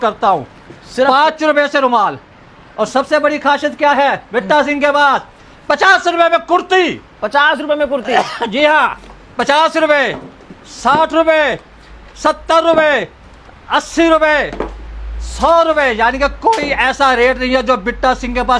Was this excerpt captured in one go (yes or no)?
yes